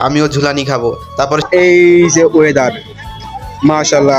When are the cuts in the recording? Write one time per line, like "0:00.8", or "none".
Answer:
0:01.4